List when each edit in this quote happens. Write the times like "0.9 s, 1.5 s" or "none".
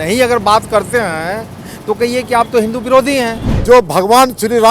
3.5 s